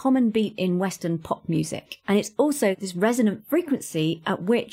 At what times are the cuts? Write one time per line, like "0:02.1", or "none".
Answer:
0:02.8